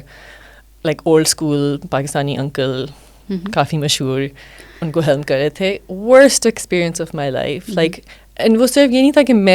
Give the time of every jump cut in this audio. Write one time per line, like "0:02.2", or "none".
none

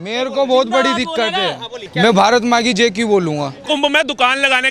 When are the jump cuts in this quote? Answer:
0:01.8
0:03.6

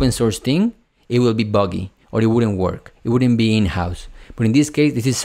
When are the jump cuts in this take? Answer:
none

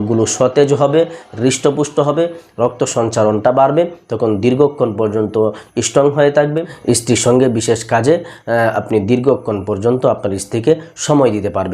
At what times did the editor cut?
0:06.7

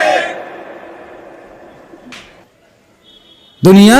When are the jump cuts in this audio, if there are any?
0:02.6

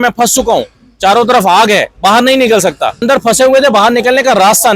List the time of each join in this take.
0:03.0

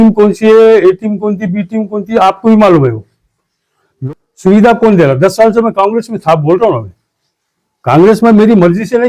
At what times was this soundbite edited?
0:04.0

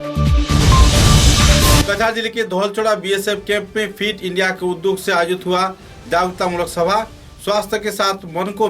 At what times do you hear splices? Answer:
0:01.8

